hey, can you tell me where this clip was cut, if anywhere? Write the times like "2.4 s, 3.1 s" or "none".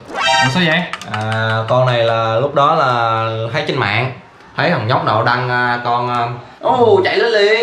6.4 s